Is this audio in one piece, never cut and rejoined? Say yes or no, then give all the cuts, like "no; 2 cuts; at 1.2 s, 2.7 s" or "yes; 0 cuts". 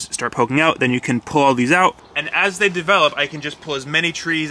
no; 1 cut; at 2.1 s